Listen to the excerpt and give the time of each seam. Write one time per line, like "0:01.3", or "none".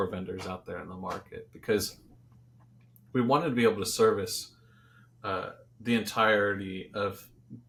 none

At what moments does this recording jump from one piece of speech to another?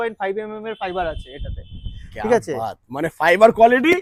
none

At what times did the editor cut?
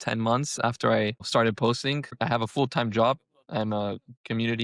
0:01.3
0:02.2

